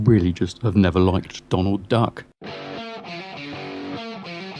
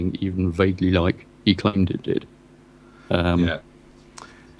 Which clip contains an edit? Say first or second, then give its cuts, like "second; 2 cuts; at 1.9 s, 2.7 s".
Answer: first; 1 cut; at 2.2 s